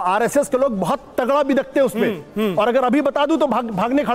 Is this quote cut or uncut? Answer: uncut